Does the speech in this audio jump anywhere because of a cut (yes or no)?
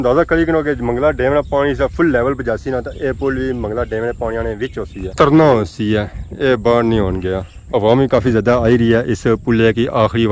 yes